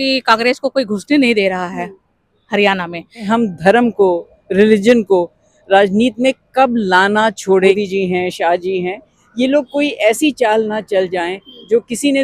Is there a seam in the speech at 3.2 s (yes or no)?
yes